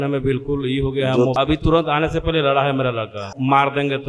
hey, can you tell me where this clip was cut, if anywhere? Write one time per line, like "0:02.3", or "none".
0:01.3
0:03.3